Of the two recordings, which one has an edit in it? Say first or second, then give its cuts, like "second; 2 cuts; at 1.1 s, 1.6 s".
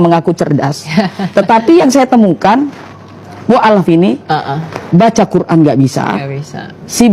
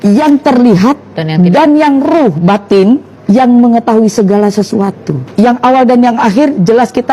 second; 2 cuts; at 3.1 s, 5.1 s